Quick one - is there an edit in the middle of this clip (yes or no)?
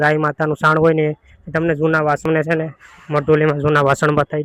no